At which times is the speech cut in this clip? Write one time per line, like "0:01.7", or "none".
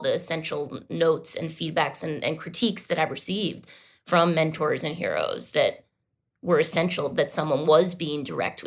none